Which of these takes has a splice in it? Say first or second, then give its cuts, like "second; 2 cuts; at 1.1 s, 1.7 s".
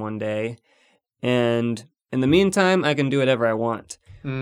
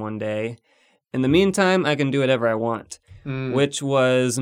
second; 1 cut; at 0.9 s